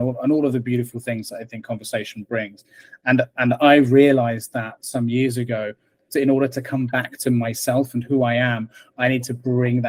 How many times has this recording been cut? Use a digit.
0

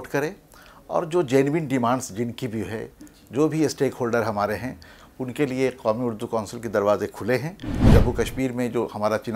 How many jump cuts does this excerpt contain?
1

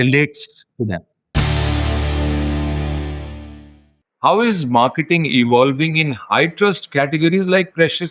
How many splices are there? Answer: 2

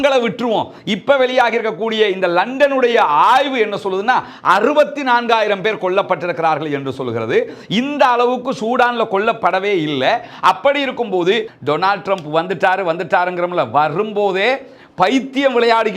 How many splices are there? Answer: 1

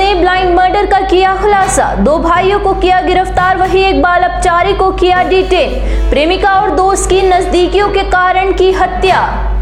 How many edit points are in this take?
0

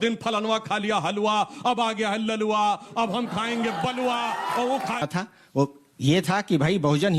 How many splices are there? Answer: 1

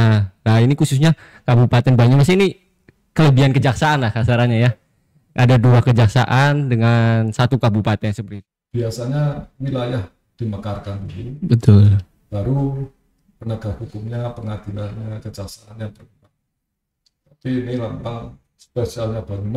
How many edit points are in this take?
1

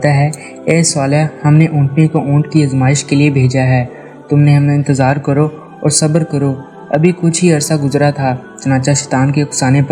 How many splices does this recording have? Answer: 0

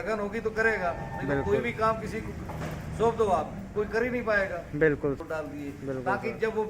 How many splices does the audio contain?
1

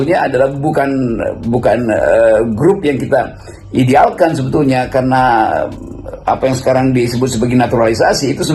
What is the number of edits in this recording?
0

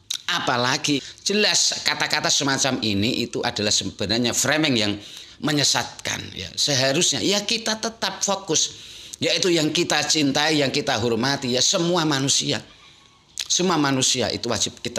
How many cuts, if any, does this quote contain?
1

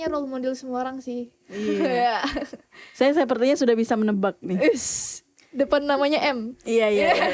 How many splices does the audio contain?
0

